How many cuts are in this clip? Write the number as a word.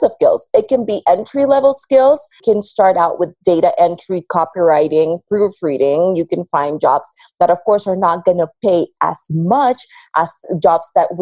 one